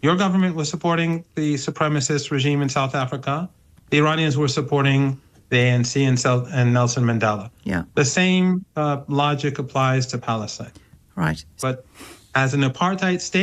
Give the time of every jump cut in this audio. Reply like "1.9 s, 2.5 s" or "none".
11.6 s